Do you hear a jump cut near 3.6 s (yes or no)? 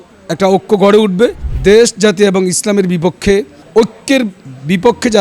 yes